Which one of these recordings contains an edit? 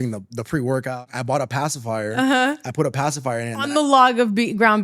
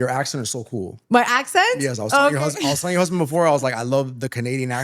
first; 1 cut; at 1.0 s

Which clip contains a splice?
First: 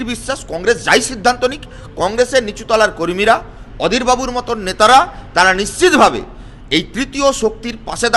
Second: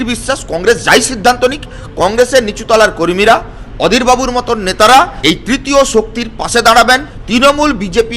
second; 2 cuts; at 5.1 s, 7.1 s

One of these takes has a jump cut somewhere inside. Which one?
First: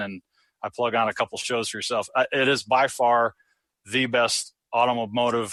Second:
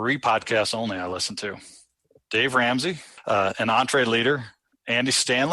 second; 1 cut; at 3.1 s

